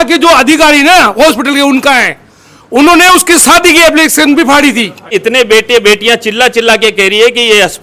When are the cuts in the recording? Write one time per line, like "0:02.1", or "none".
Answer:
0:05.1